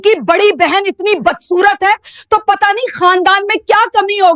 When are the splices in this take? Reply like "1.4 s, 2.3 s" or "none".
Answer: none